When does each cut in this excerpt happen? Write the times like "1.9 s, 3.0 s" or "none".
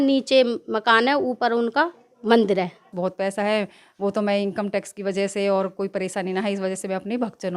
2.9 s